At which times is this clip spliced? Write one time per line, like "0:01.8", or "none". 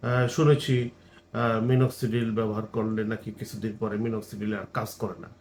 none